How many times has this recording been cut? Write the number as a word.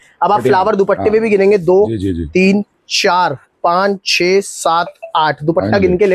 zero